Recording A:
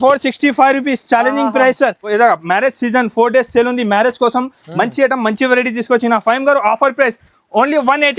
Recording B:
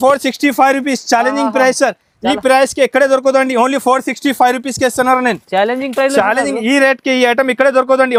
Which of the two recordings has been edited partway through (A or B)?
A